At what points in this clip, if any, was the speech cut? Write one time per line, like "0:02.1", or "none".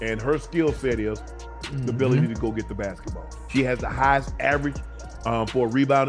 0:03.5